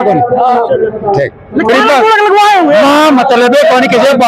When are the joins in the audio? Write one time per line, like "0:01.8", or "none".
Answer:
0:01.7